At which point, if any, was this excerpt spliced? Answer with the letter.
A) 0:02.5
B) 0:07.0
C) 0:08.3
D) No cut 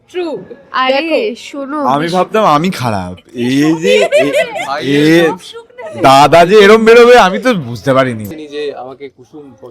C